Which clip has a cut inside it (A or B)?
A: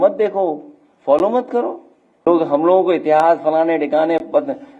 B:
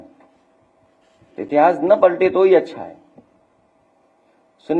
A